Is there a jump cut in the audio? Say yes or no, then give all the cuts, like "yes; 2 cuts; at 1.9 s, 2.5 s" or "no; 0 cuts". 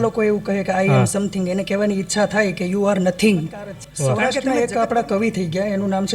yes; 1 cut; at 4.2 s